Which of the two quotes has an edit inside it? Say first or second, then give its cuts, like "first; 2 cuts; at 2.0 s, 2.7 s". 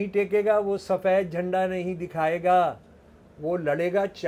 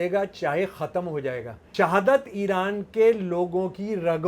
second; 1 cut; at 1.6 s